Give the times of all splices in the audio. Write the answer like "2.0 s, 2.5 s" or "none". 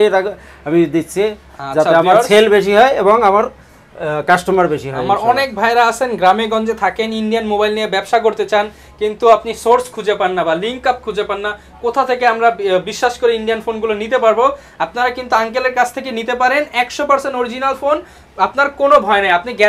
none